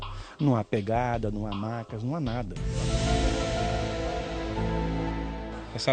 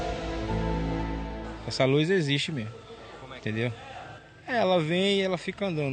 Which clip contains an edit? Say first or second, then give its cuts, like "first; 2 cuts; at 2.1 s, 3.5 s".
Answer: first; 1 cut; at 2.6 s